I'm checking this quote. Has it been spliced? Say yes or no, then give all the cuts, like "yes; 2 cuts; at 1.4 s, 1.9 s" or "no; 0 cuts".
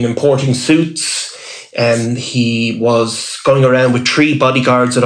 no; 0 cuts